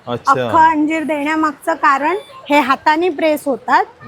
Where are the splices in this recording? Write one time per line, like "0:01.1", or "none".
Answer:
none